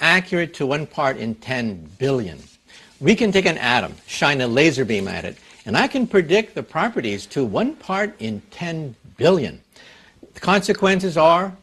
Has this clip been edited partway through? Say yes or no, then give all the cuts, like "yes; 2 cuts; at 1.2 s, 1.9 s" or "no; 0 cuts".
no; 0 cuts